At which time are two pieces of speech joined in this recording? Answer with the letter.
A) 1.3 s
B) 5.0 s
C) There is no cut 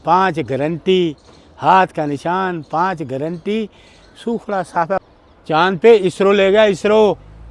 B